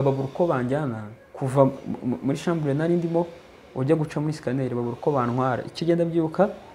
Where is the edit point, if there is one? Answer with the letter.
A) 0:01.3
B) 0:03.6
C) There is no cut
C